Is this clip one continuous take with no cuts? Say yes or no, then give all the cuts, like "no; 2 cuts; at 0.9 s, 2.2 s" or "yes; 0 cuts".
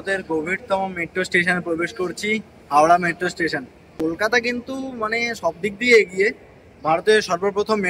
yes; 0 cuts